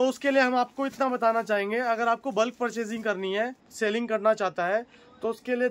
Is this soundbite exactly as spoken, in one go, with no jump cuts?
no; 1 cut; at 3.6 s

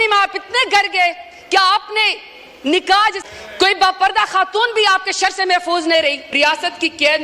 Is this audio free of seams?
no; 1 cut; at 3.3 s

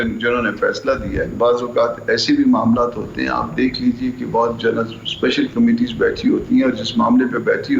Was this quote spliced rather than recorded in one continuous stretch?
yes; 1 cut; at 1.3 s

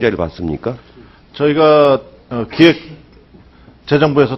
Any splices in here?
no; 0 cuts

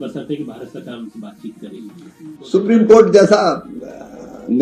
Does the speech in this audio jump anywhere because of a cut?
yes; 1 cut; at 2.4 s

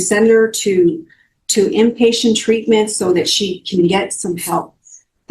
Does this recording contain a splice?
no; 0 cuts

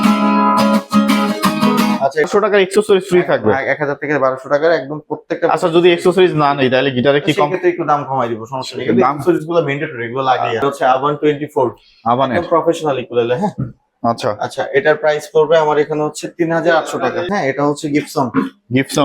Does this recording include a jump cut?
yes; 3 cuts; at 2.3 s, 10.6 s, 17.3 s

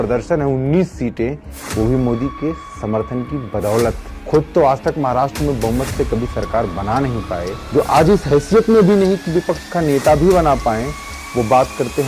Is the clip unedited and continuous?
yes; 0 cuts

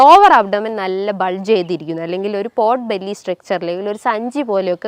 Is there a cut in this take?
no; 0 cuts

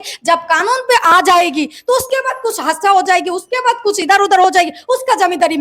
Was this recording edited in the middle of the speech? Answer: no; 0 cuts

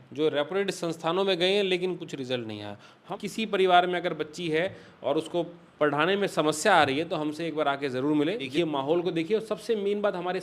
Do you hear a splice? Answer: yes; 2 cuts; at 3.1 s, 8.5 s

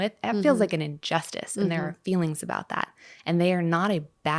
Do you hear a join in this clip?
no; 0 cuts

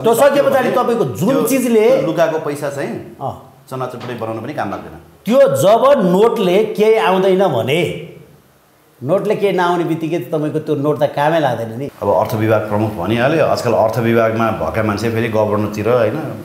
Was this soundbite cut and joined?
yes; 1 cut; at 11.8 s

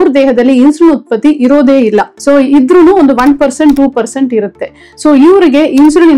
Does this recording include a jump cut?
yes; 1 cut; at 2.1 s

